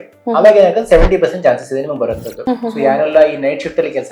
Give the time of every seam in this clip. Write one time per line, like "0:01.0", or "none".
0:02.4